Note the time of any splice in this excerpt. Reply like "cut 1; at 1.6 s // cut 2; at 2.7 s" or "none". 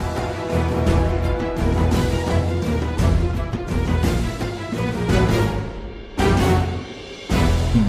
none